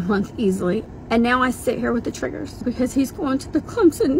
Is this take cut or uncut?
cut